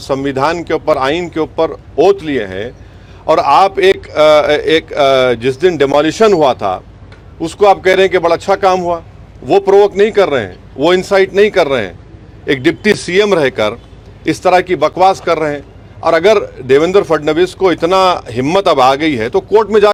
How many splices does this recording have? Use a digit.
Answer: 0